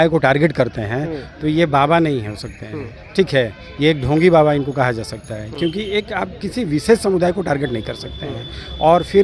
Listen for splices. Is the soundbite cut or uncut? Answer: uncut